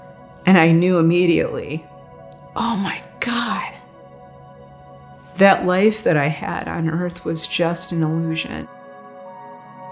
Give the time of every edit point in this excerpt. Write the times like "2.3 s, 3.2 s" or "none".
8.7 s